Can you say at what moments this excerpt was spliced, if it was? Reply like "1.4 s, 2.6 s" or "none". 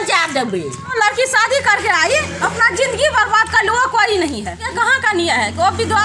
0.9 s, 4.7 s

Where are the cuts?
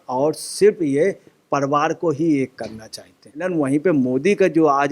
3.5 s

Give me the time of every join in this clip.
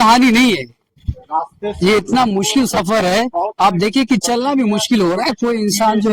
none

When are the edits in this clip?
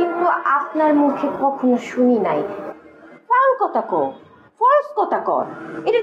2.6 s

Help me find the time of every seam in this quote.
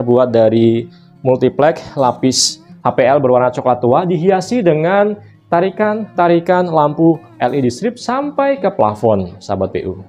none

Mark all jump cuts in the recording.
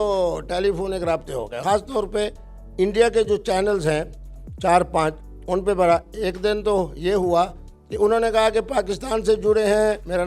1.6 s

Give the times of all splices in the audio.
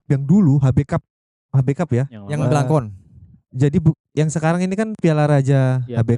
none

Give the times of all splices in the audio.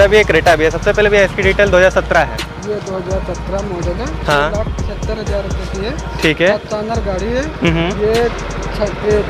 none

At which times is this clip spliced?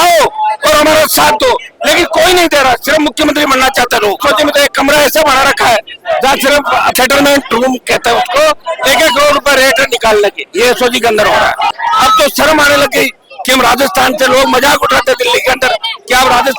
4.2 s, 6.9 s, 8.7 s, 11.8 s

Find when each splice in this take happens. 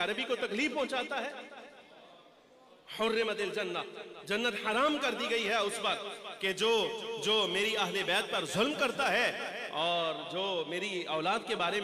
none

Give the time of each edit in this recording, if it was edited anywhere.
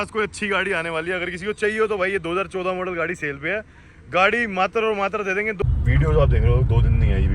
5.6 s

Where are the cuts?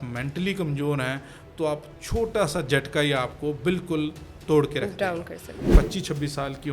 5.7 s

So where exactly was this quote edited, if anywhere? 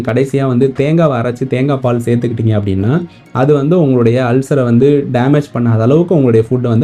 none

